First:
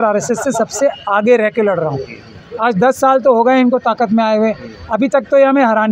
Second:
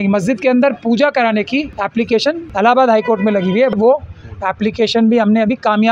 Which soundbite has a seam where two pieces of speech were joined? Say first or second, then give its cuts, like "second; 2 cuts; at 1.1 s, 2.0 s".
second; 2 cuts; at 2.0 s, 3.8 s